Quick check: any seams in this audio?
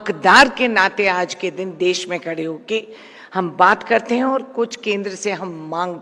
no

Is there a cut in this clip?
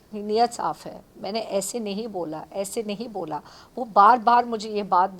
no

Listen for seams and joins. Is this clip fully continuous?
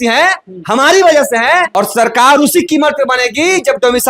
no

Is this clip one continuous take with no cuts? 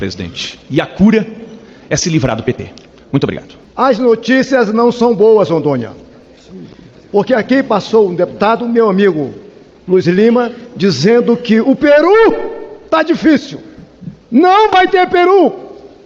yes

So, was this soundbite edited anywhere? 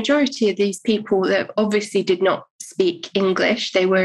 no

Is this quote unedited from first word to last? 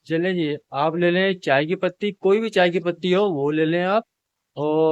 yes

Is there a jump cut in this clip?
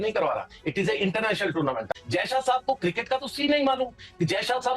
yes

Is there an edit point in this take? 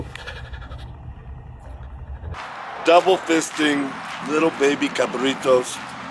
yes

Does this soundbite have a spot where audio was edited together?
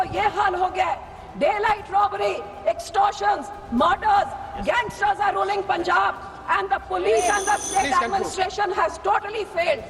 no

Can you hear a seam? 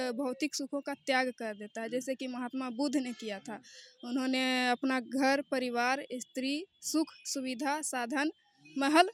no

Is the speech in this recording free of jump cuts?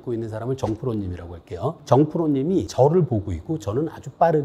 yes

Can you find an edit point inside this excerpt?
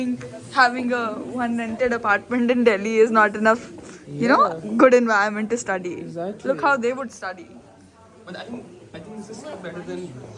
no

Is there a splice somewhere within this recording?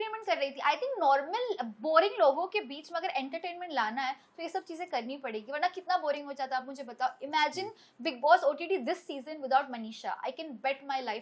no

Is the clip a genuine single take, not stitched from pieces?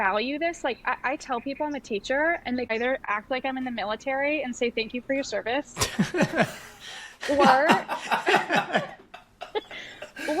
no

